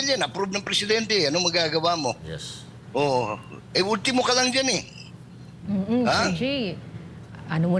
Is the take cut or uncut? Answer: uncut